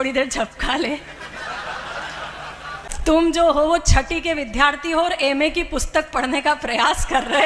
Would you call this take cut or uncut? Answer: cut